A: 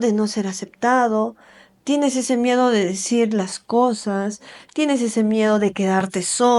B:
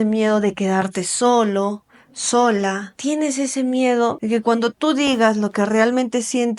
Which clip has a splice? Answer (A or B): B